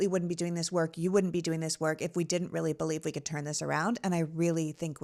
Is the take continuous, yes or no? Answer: yes